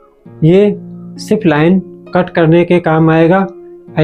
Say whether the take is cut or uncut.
uncut